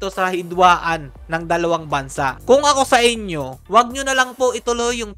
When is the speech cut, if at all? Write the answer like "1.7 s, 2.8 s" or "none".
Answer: none